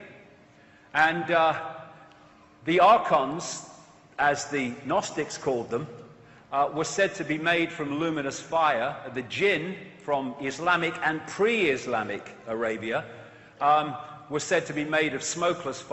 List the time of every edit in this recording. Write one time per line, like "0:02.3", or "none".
none